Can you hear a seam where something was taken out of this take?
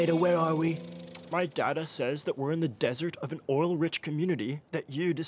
no; 0 cuts

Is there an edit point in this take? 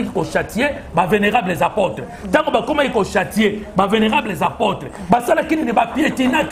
no; 0 cuts

